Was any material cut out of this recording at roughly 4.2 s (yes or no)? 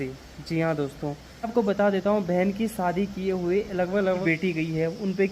yes